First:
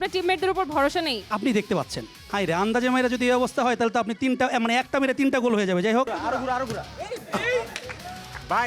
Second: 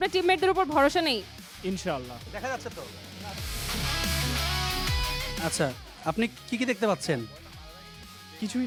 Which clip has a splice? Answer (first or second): first